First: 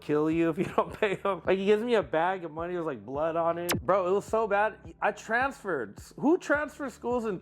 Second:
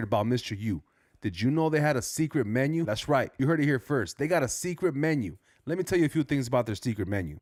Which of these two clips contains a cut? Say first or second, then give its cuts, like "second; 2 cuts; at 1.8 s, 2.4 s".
first; 2 cuts; at 1.4 s, 3.7 s